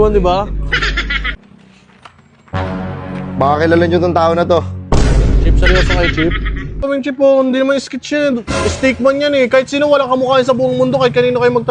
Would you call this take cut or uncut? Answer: cut